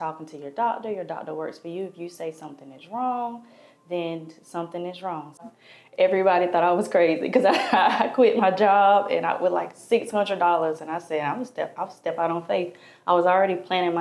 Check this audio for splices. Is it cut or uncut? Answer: cut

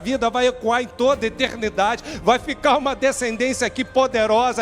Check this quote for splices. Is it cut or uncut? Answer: uncut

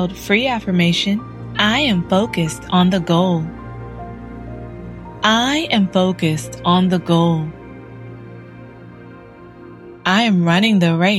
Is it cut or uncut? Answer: cut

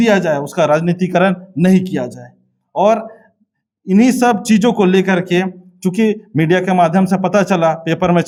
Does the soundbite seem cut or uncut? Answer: uncut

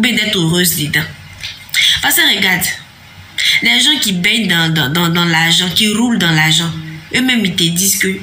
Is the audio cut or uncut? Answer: uncut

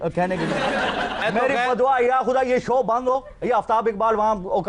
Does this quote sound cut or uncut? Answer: cut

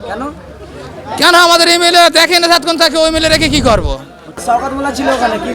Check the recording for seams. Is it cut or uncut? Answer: cut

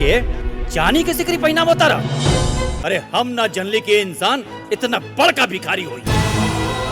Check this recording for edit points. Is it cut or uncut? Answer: cut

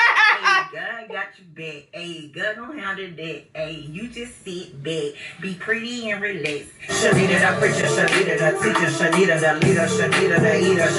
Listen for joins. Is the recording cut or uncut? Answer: uncut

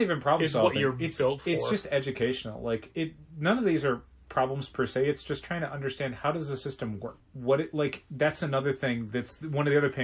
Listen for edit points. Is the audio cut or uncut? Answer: uncut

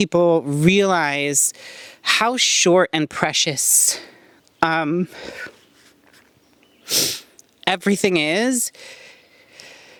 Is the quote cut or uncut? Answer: uncut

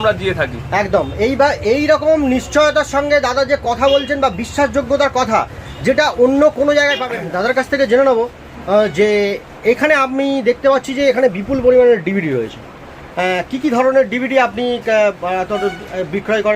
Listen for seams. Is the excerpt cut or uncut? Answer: cut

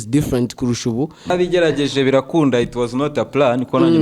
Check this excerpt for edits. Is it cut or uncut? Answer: cut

